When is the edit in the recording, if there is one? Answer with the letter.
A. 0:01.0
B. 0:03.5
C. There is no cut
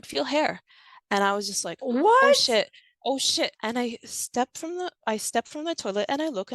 B